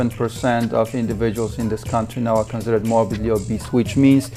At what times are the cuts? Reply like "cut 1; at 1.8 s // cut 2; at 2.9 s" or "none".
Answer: none